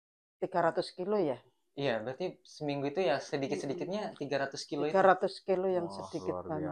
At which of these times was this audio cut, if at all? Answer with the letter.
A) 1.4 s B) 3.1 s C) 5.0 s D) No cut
D